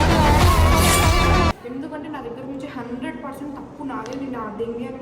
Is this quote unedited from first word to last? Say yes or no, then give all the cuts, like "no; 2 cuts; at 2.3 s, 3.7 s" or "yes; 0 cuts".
no; 1 cut; at 1.6 s